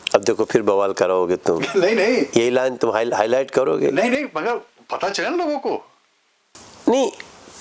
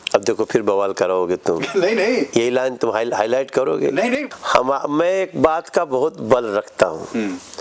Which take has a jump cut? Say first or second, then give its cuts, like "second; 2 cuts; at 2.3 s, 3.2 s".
second; 1 cut; at 4.3 s